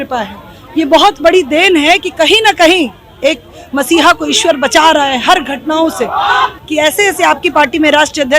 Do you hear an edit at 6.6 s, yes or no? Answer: yes